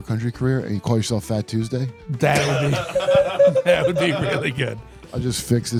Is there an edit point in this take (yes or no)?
no